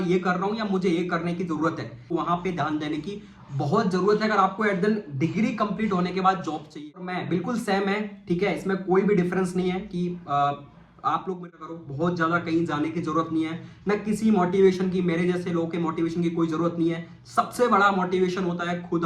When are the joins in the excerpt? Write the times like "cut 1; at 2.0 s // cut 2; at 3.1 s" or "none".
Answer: cut 1; at 2.1 s // cut 2; at 7.2 s // cut 3; at 11.6 s